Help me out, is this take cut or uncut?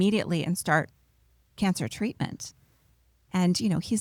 uncut